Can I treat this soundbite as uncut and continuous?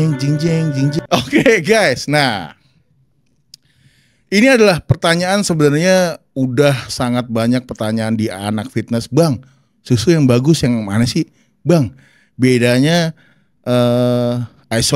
yes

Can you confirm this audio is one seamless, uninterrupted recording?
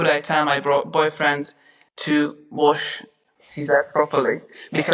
yes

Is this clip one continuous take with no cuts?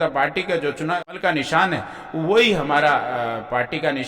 no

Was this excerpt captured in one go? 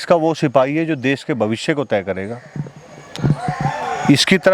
yes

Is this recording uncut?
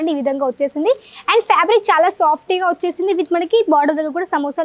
yes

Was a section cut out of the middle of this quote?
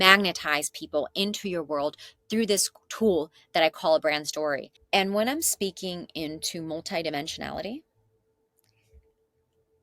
no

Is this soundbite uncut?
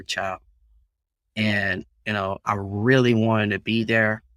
yes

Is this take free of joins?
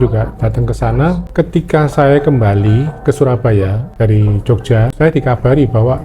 no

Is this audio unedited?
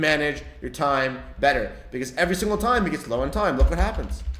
yes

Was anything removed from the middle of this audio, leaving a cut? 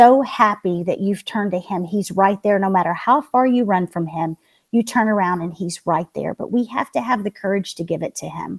no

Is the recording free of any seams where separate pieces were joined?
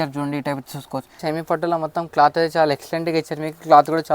no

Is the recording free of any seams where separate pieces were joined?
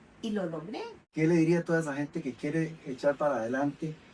no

